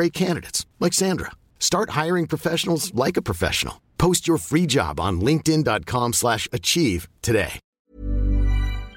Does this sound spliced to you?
yes; 1 cut; at 7.6 s

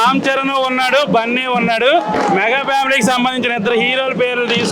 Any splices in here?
no; 0 cuts

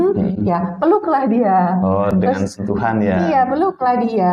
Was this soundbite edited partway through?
no; 0 cuts

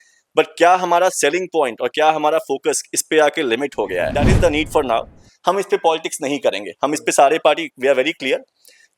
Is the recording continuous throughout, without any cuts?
no; 1 cut; at 4.2 s

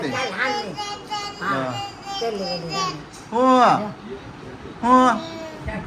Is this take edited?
no; 0 cuts

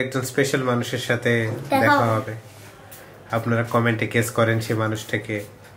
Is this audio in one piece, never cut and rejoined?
yes; 0 cuts

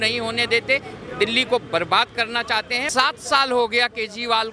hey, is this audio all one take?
no; 1 cut; at 2.8 s

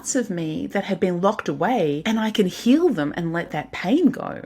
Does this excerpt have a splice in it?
yes; 2 cuts; at 2.0 s, 3.5 s

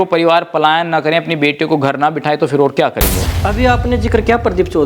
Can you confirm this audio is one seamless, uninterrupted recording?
no; 1 cut; at 3.3 s

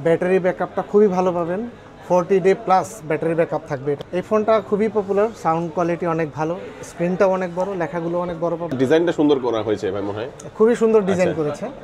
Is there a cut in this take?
yes; 2 cuts; at 4.0 s, 8.8 s

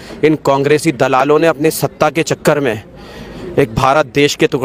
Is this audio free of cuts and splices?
yes; 0 cuts

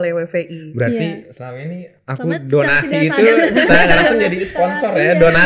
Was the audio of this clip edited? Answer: no; 0 cuts

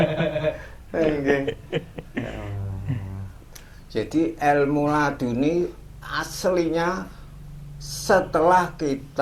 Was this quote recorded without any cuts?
yes; 0 cuts

